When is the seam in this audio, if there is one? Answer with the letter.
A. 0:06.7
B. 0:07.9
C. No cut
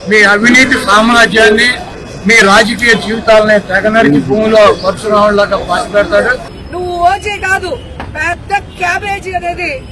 B